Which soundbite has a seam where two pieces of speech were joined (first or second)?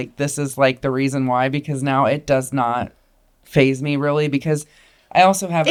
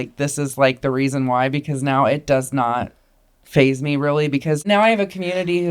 second